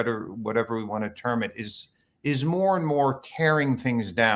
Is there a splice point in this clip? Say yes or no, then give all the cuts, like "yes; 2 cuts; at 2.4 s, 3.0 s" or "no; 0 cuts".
no; 0 cuts